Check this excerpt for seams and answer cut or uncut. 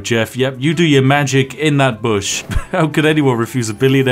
cut